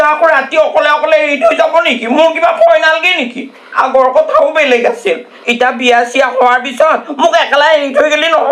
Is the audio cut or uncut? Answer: uncut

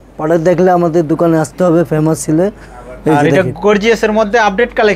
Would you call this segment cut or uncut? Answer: uncut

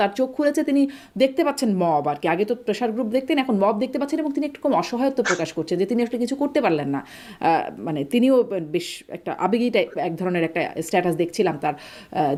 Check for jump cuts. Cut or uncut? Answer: uncut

